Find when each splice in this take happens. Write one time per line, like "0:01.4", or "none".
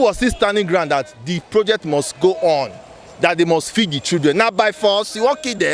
none